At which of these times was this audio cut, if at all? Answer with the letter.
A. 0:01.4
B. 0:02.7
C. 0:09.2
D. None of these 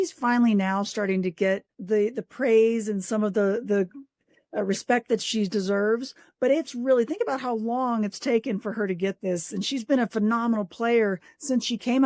A